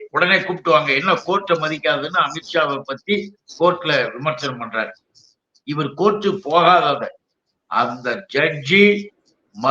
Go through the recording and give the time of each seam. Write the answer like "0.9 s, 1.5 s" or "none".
none